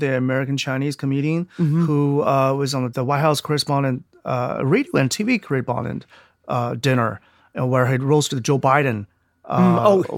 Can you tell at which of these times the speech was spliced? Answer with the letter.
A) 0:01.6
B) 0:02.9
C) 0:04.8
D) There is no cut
B